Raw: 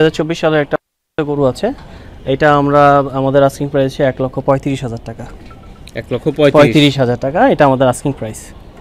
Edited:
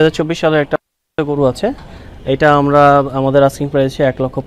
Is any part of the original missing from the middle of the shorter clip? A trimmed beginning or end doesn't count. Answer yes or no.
no